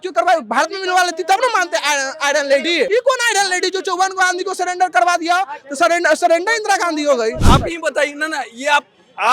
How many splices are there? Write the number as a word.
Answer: two